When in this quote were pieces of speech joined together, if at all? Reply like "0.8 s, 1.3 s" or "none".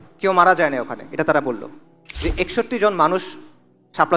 2.0 s